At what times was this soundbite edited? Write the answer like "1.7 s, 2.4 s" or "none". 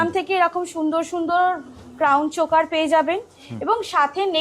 none